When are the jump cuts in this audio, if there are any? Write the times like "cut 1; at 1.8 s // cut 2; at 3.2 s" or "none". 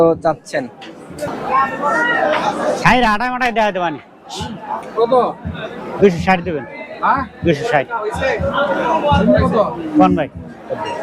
cut 1; at 1.3 s